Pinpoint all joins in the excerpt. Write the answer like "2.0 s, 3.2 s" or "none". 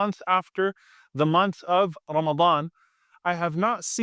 3.1 s